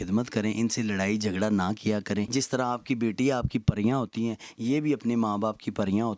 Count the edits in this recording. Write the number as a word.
one